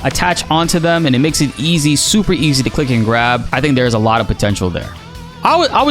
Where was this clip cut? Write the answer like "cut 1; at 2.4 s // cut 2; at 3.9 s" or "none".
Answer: cut 1; at 4.9 s